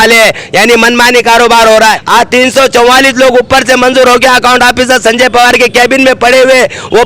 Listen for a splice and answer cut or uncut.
cut